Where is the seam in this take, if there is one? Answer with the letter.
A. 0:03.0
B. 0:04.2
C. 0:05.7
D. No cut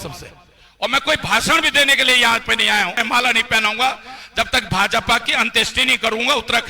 A